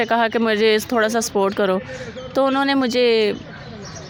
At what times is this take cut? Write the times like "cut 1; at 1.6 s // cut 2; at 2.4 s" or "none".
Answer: none